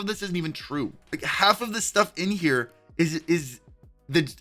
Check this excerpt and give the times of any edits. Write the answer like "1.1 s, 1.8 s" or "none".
1.0 s